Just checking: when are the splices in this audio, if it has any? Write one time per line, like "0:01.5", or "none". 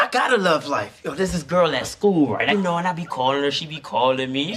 none